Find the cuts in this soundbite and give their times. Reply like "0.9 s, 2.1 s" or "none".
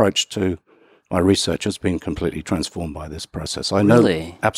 none